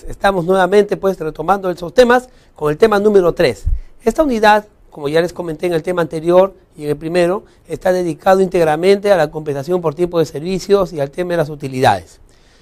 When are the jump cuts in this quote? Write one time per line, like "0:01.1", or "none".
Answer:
0:01.3

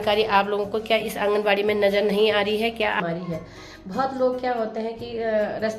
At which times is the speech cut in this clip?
0:03.0

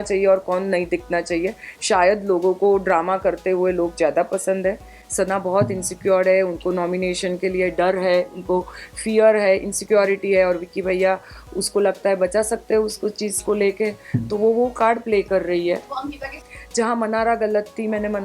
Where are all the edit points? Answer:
0:05.0
0:16.3

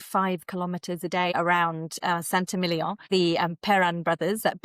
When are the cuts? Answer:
0:01.3
0:03.0

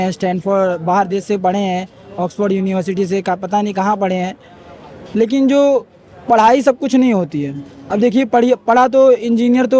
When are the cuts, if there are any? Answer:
none

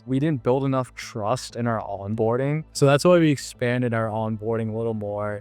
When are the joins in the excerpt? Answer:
0:02.7

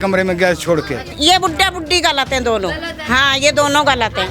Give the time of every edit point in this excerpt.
0:01.1

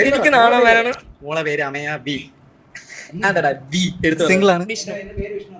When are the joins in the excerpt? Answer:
none

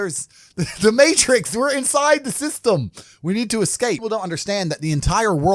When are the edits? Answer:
0:04.0

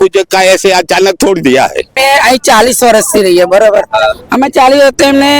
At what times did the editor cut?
0:02.0

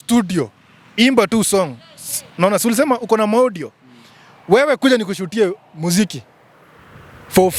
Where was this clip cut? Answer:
none

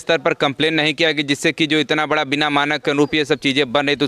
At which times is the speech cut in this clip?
none

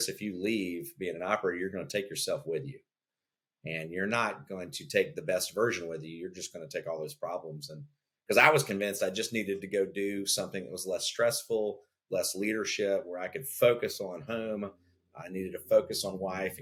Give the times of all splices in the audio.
none

